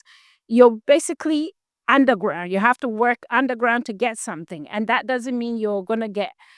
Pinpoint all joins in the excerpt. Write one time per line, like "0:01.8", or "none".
none